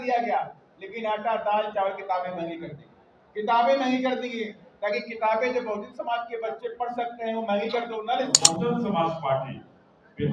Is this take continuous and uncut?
no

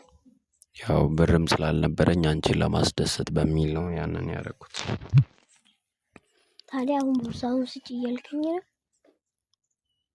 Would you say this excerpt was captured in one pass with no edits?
yes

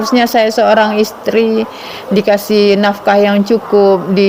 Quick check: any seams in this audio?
no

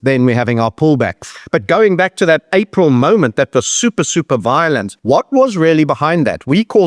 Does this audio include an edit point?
yes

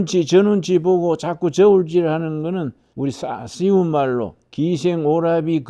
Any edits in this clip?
no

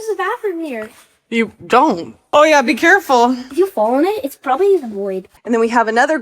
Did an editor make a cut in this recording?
yes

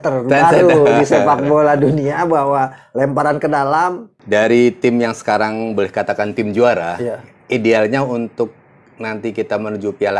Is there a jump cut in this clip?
yes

